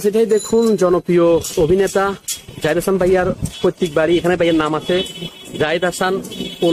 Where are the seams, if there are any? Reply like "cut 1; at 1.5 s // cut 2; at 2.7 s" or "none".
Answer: none